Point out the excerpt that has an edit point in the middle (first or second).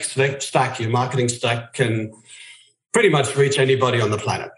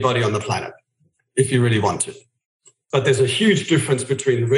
second